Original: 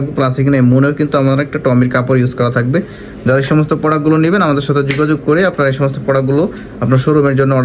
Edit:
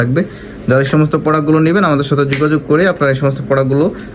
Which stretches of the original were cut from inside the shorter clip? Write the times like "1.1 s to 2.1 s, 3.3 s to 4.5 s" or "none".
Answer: none